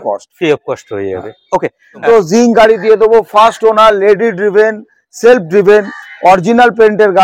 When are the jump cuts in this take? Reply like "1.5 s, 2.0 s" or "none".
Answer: 2.0 s

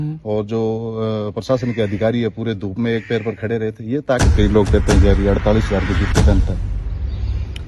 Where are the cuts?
4.3 s

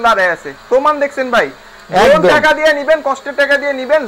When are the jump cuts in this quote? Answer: none

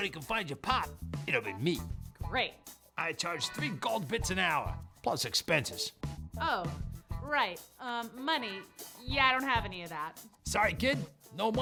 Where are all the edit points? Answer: none

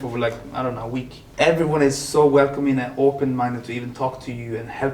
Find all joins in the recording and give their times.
1.2 s

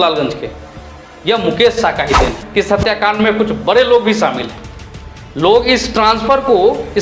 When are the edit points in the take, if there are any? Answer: 2.4 s

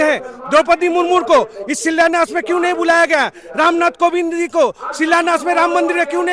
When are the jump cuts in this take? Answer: none

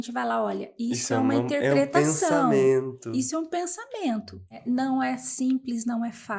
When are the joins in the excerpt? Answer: 4.6 s

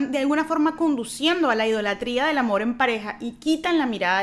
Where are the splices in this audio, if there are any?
none

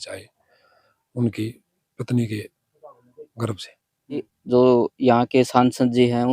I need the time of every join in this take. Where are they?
4.3 s

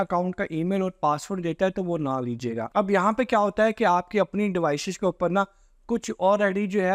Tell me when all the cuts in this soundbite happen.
2.6 s

